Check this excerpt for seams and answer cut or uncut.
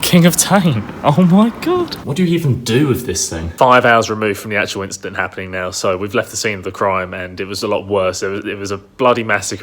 cut